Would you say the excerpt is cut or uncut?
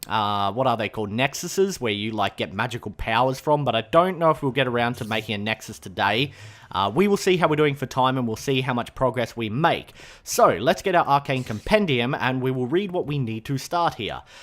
cut